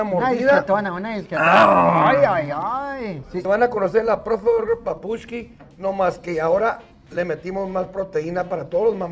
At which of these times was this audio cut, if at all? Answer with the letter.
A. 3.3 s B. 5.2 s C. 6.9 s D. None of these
A